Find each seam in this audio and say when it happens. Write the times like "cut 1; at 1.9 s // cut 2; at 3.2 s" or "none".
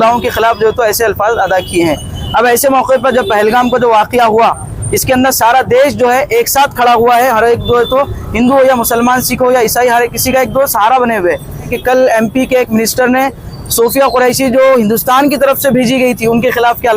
cut 1; at 11.7 s